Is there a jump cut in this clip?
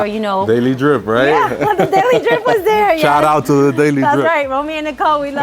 no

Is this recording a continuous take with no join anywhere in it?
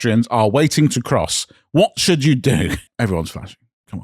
no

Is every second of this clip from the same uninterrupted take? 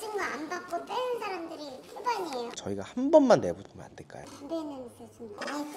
no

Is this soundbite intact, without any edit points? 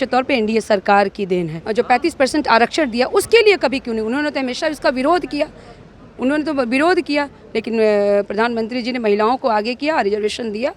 no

